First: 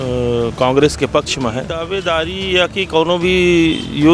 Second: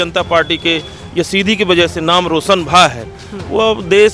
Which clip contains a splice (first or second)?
first